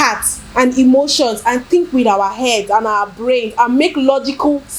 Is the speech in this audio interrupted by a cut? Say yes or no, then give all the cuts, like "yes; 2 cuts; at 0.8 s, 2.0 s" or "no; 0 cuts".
no; 0 cuts